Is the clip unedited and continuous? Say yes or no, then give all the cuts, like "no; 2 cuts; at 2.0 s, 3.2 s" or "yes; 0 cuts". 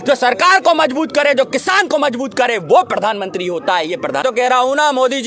no; 1 cut; at 4.2 s